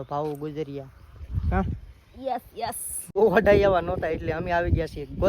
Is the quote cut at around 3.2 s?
yes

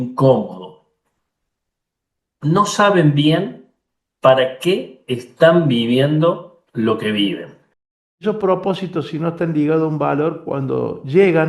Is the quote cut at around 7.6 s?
yes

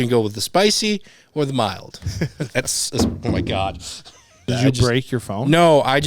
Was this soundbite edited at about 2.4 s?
no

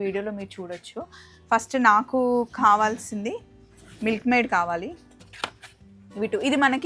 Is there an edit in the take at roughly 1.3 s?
no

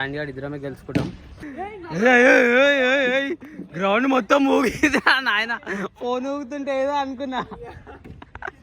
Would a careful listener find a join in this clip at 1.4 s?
yes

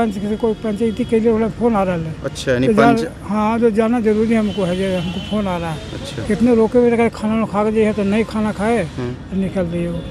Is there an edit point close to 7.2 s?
no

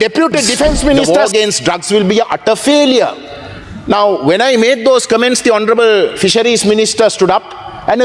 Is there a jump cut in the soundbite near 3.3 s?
no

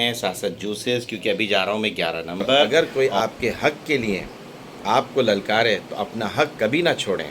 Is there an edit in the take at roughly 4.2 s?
no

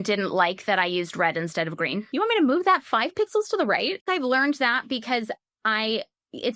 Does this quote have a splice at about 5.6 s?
no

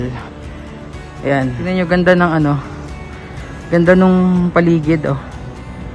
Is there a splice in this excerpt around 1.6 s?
yes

